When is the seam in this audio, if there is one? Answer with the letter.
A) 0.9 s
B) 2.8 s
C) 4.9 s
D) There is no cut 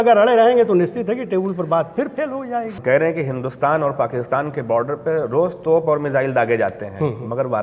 B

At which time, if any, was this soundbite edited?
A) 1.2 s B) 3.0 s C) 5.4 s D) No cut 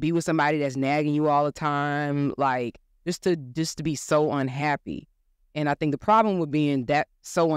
D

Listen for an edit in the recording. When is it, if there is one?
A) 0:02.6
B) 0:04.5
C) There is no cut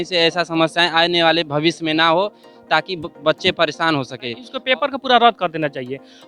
B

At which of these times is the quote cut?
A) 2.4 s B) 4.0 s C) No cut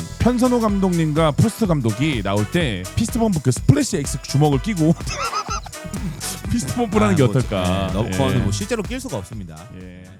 C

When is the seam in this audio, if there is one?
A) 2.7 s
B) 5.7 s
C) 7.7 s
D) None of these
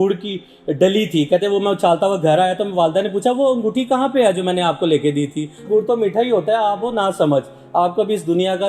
B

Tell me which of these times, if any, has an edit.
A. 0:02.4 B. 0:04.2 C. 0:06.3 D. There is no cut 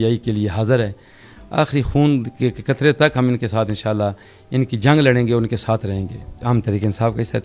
C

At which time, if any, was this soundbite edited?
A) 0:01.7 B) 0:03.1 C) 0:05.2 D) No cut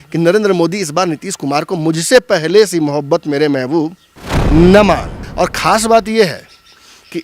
C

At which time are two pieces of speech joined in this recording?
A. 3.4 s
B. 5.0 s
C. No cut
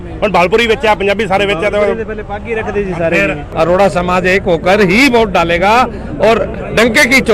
A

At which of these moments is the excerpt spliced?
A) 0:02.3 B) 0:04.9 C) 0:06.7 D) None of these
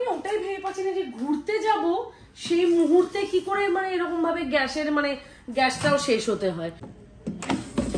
D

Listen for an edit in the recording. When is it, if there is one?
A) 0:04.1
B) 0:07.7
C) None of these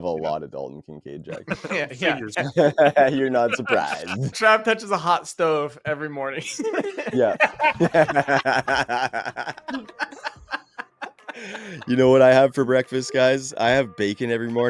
A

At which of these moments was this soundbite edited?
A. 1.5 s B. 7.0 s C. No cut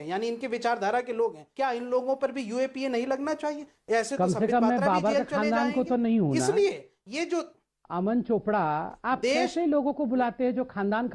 A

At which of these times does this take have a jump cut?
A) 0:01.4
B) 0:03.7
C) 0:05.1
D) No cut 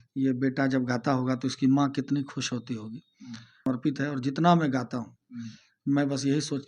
B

